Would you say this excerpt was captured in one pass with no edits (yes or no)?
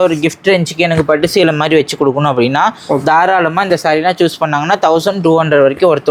yes